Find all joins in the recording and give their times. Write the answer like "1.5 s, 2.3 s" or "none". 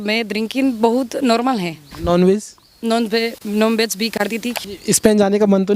1.8 s, 4.6 s